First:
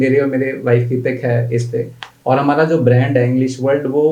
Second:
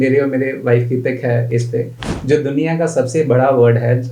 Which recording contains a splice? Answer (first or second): second